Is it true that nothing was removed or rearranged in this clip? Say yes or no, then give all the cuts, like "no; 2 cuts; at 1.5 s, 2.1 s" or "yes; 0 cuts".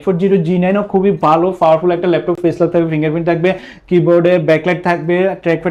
yes; 0 cuts